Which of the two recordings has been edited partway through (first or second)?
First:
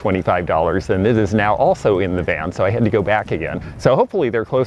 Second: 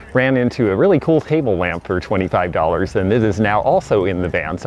first